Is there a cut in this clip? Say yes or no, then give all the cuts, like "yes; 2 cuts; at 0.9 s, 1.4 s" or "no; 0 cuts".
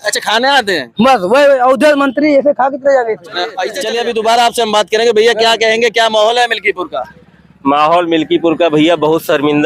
yes; 1 cut; at 3.7 s